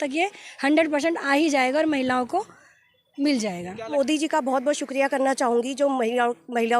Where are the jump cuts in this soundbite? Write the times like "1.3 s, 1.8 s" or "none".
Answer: 3.9 s

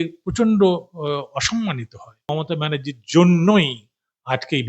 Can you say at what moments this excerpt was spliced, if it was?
2.3 s

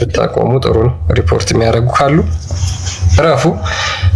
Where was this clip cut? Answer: none

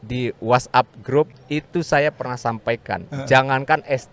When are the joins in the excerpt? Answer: 1.3 s

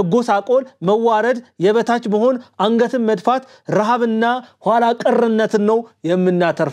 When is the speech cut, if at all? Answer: none

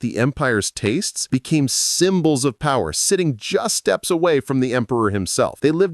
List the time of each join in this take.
1.1 s

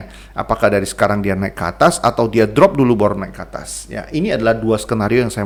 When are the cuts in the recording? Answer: none

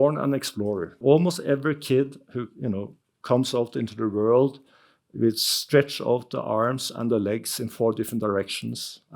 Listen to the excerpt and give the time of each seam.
1.0 s

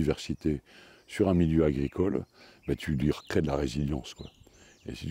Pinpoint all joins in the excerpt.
none

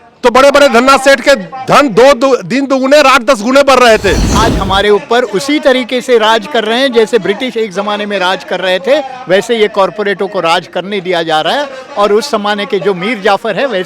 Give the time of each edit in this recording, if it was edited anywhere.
4.4 s

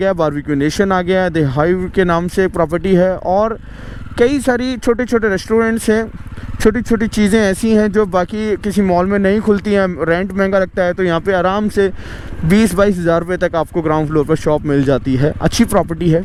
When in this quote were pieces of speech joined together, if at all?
none

